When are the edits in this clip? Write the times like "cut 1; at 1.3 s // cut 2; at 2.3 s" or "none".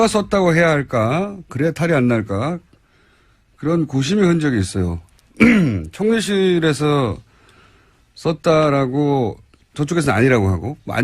cut 1; at 2.0 s